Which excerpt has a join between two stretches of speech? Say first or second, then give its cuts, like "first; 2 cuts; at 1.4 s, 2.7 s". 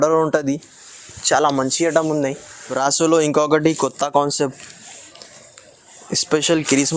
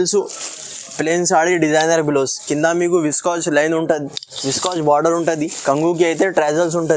first; 1 cut; at 2.6 s